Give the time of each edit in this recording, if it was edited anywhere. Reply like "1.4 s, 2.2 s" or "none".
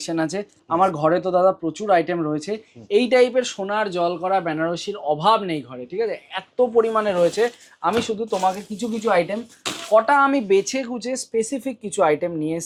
none